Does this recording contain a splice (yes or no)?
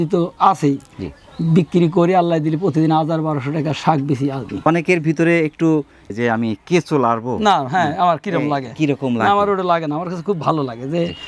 yes